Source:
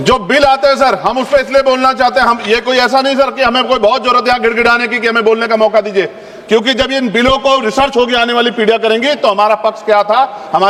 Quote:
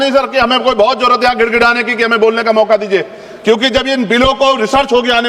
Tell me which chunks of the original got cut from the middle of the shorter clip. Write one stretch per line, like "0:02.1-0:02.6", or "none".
none